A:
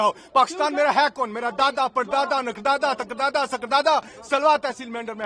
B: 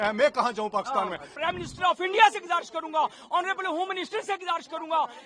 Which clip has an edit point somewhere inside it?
B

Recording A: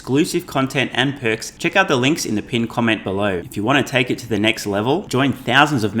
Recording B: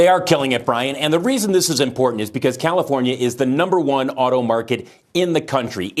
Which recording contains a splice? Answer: A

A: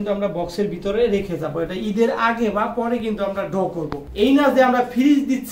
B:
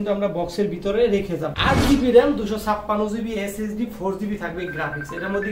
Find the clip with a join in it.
B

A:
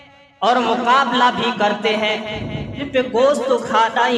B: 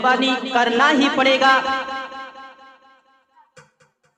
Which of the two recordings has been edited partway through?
A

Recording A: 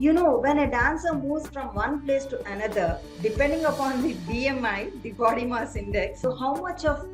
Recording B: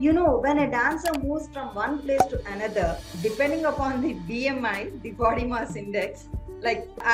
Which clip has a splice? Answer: A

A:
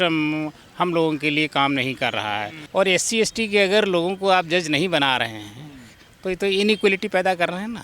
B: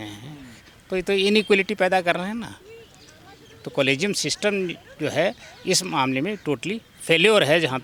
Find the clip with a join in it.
A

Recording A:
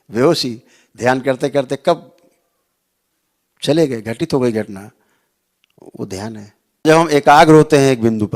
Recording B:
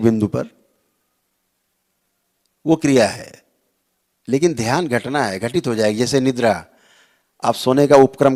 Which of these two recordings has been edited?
A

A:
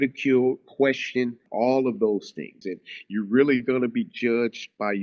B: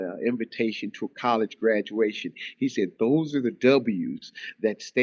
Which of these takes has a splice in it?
A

